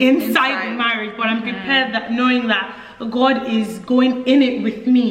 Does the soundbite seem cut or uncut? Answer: uncut